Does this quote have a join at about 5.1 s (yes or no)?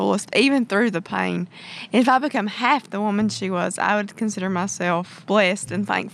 yes